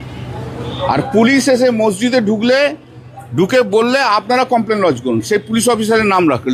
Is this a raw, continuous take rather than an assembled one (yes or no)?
yes